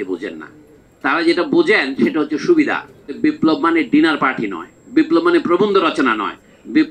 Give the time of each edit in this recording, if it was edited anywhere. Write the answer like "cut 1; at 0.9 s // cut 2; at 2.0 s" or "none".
cut 1; at 3.2 s